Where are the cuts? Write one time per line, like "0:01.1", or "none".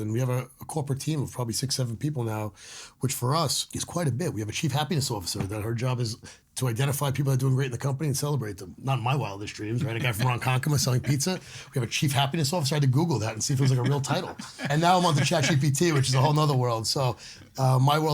0:03.7
0:08.8
0:14.7

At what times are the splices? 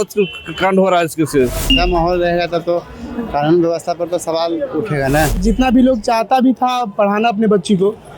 0:01.6
0:05.4

